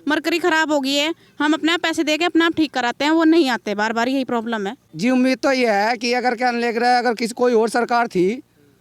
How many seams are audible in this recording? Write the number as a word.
one